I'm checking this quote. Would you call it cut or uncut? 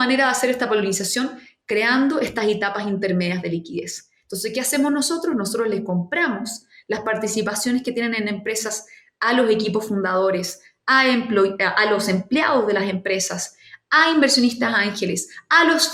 uncut